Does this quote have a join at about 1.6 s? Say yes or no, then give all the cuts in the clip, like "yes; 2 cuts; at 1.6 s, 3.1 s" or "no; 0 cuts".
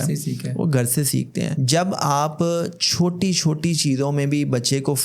yes; 1 cut; at 1.6 s